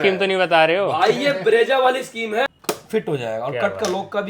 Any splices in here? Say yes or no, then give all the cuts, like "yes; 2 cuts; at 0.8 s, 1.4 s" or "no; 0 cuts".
yes; 1 cut; at 2.5 s